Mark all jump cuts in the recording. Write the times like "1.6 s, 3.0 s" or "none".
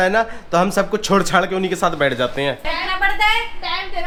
none